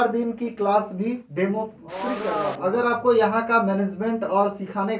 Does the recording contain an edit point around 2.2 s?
yes; 1 cut; at 2.2 s

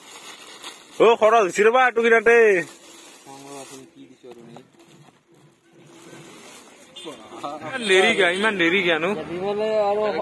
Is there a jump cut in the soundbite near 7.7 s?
yes; 1 cut; at 7.7 s

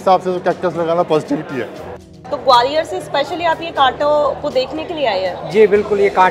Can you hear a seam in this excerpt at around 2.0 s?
yes; 1 cut; at 2.0 s

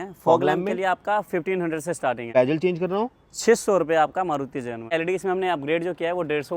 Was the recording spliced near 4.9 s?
yes; 2 cuts; at 2.3 s, 4.9 s

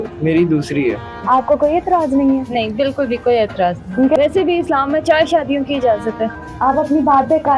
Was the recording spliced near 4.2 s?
yes; 3 cuts; at 1.2 s, 4.2 s, 6.4 s

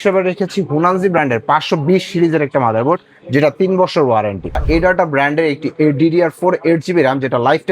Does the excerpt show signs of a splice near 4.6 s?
yes; 1 cut; at 4.6 s

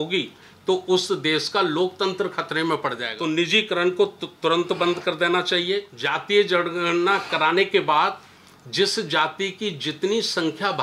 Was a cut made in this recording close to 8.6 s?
no; 2 cuts; at 3.1 s, 5.9 s

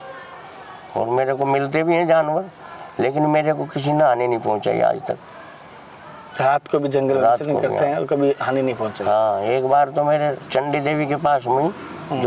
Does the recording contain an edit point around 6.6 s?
no; 0 cuts

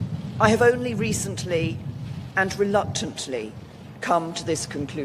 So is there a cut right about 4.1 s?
yes; 1 cut; at 4.1 s

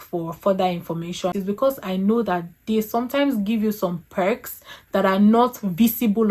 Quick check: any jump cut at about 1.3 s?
yes; 1 cut; at 1.3 s

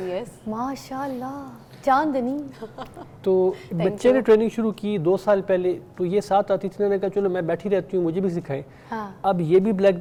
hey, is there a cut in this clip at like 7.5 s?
no; 0 cuts

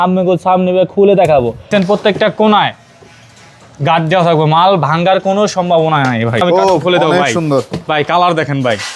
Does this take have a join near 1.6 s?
yes; 2 cuts; at 1.6 s, 6.4 s

